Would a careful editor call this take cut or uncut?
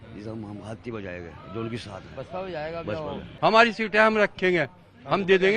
cut